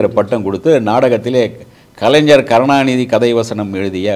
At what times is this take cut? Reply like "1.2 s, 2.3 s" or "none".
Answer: none